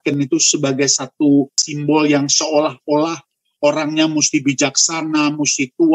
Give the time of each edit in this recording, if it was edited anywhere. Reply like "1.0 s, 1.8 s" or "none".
1.6 s